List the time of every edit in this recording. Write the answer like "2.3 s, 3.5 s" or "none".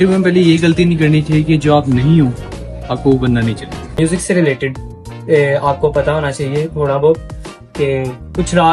3.9 s